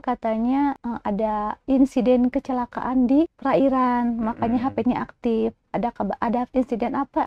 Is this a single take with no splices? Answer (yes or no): no